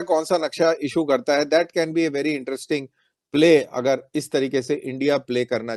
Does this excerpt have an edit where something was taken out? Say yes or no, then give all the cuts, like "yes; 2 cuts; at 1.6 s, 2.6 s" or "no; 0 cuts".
no; 0 cuts